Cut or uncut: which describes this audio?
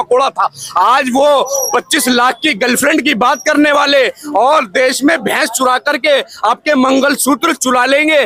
uncut